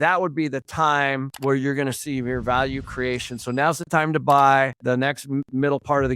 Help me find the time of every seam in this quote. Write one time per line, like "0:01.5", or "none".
0:01.3